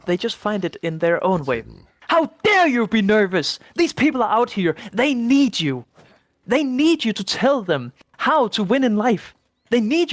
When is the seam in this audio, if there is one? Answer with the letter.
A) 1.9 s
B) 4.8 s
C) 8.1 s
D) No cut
A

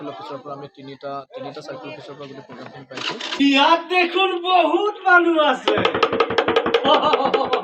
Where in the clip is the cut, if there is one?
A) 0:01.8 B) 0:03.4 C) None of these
B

